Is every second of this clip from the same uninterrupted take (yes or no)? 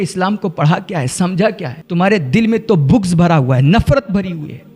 no